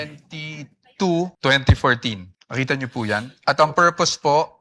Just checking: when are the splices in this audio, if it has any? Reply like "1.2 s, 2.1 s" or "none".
1.3 s, 2.3 s, 3.3 s